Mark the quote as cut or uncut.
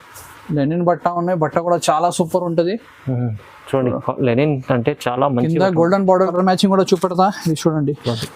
cut